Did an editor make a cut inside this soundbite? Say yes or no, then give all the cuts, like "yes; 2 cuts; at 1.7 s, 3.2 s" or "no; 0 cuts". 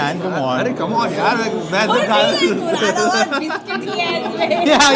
no; 0 cuts